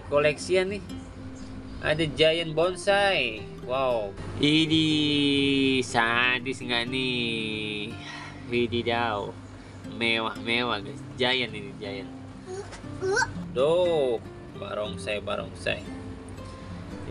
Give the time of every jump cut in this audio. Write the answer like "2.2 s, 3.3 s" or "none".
4.2 s, 13.4 s

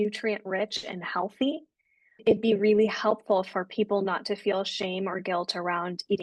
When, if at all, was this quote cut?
none

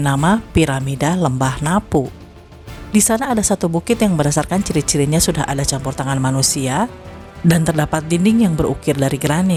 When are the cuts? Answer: none

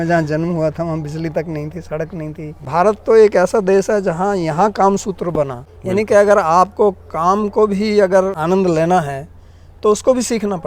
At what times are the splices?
2.6 s, 5.7 s, 8.4 s

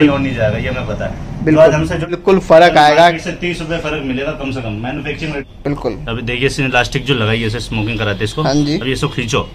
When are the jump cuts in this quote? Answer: 2.2 s, 5.4 s

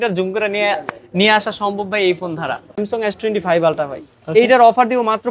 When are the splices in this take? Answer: 2.8 s

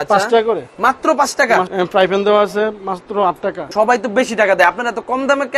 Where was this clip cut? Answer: 1.7 s, 3.6 s

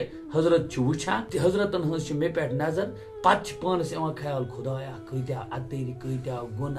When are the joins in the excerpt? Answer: 1.2 s

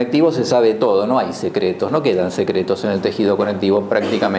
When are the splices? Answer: 1.9 s

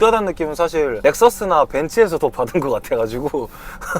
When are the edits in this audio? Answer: 0.9 s

